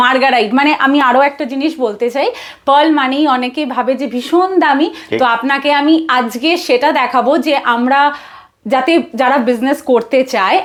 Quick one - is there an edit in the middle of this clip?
no; 0 cuts

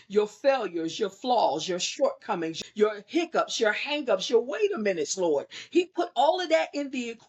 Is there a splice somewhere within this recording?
yes; 1 cut; at 2.5 s

